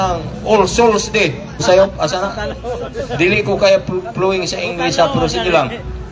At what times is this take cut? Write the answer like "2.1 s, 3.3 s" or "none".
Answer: 1.5 s